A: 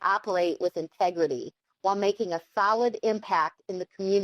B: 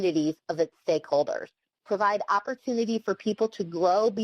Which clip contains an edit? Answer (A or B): B